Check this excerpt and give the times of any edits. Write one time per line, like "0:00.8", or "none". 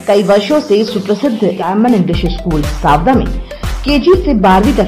0:01.6